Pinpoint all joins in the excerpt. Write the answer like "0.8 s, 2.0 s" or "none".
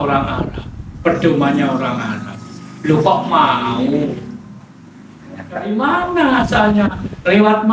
5.7 s

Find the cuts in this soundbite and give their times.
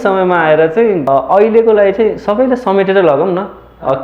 1.0 s

